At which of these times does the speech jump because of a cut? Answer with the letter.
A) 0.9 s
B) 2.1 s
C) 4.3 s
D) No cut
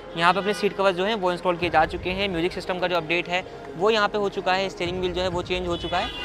D